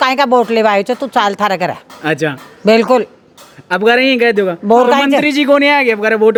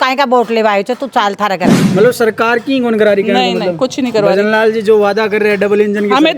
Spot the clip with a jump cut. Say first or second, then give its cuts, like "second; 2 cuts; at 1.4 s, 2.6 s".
second; 1 cut; at 1.8 s